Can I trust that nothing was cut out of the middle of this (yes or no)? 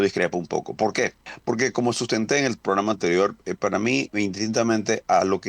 no